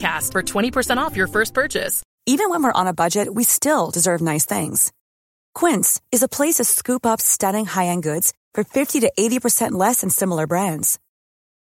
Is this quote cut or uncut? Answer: cut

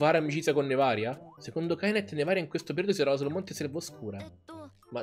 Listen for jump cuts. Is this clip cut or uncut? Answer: cut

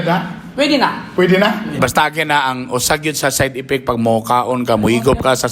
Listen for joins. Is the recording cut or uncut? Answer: cut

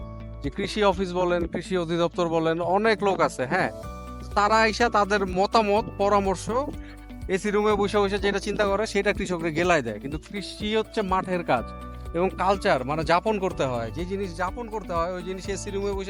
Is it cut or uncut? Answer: uncut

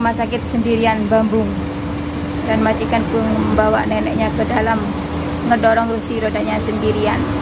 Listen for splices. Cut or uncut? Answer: uncut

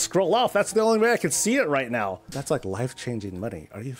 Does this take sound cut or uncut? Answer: cut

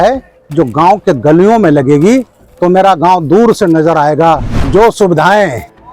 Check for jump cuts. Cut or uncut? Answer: cut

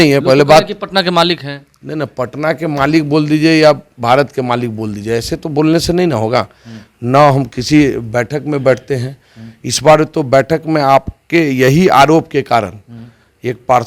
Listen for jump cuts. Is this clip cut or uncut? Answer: uncut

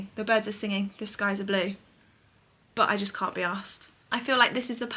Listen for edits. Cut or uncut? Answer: uncut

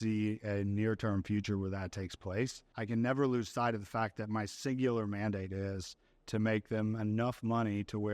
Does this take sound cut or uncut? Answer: cut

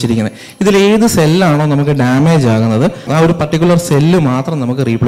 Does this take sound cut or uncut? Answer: cut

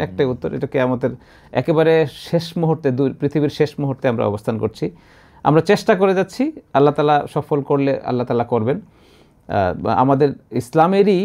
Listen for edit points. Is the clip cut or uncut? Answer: uncut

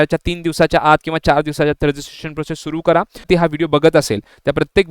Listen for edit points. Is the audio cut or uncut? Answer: cut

